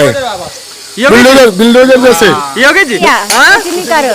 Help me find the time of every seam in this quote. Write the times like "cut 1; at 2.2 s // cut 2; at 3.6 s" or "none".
cut 1; at 3.0 s